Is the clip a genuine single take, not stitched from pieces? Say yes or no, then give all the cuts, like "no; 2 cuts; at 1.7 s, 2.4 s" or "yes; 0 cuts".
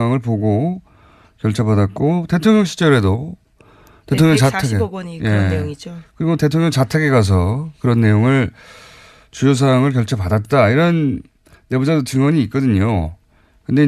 yes; 0 cuts